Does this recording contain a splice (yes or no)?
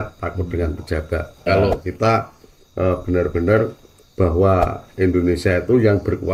yes